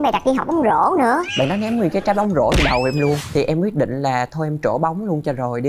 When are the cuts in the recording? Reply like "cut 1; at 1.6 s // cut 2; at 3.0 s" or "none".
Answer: cut 1; at 1.3 s // cut 2; at 3.2 s

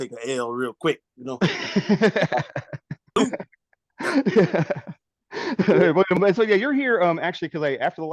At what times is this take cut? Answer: cut 1; at 3.1 s // cut 2; at 6.2 s

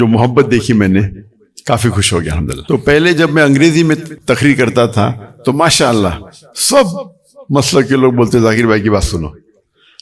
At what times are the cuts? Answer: cut 1; at 2.6 s // cut 2; at 4.1 s

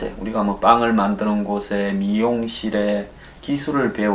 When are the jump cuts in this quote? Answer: none

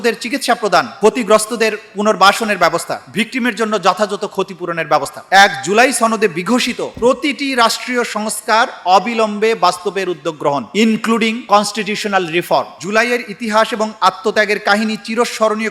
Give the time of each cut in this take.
cut 1; at 2.9 s // cut 2; at 5.2 s // cut 3; at 12.7 s

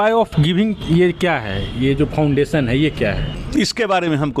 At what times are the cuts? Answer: cut 1; at 3.3 s

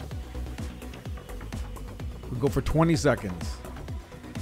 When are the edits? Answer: cut 1; at 2.3 s // cut 2; at 3.4 s

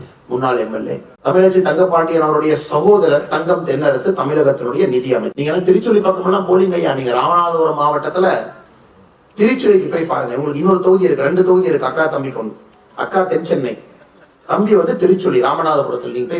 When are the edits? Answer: none

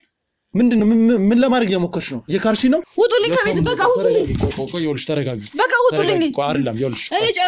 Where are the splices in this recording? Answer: cut 1; at 2.9 s

